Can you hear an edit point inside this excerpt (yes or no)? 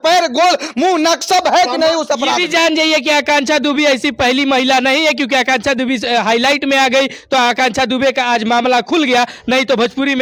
no